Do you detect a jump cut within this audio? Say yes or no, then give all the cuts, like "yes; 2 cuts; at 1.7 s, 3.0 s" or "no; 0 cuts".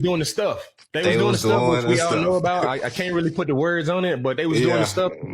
no; 0 cuts